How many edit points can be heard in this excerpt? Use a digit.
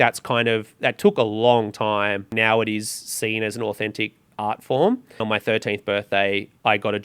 2